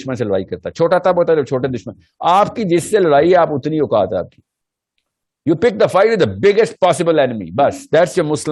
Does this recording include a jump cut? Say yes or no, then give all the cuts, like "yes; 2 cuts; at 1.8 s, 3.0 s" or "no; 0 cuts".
no; 0 cuts